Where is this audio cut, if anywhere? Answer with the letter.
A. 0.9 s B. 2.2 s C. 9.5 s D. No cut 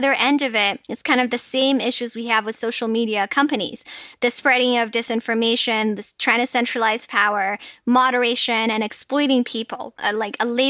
A